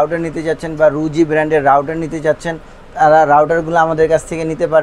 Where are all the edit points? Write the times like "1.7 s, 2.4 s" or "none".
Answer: none